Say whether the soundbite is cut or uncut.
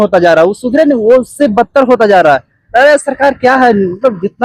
uncut